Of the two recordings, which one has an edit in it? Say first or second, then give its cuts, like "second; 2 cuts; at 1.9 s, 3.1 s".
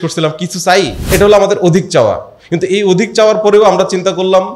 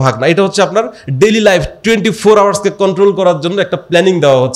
first; 1 cut; at 1.0 s